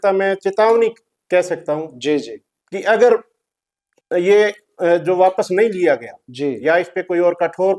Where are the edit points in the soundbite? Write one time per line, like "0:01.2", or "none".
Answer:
none